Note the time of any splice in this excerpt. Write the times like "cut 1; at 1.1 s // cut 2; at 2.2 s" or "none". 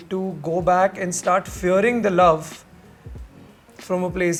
none